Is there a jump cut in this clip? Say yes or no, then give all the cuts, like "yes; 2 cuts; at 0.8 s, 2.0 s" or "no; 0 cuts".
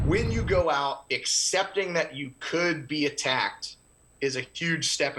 no; 0 cuts